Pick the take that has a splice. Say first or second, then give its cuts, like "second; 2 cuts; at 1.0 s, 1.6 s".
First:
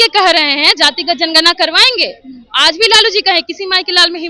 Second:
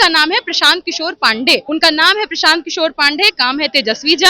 second; 1 cut; at 1.6 s